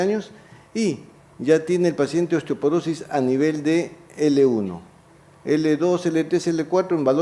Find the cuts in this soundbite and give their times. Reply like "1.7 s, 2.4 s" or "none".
3.6 s